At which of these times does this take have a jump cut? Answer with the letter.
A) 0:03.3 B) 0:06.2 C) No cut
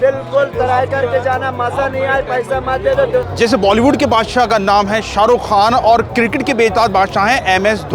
A